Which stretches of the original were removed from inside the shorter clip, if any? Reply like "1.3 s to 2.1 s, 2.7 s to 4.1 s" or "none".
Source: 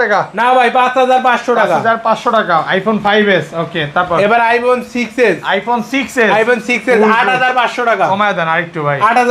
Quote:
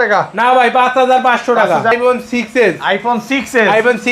1.9 s to 4.5 s